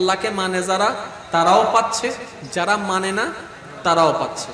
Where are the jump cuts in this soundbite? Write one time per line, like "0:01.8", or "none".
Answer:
none

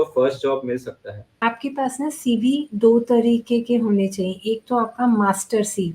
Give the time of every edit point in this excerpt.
0:01.3

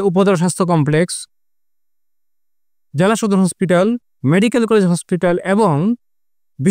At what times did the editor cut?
none

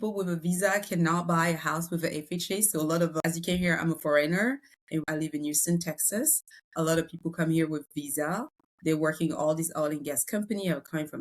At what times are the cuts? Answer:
0:03.1
0:05.0

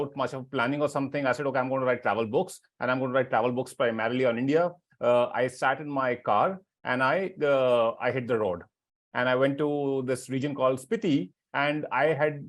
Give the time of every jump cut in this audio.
0:11.4

